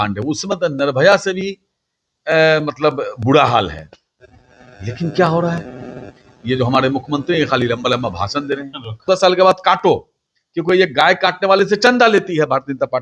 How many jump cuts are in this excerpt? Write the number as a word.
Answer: one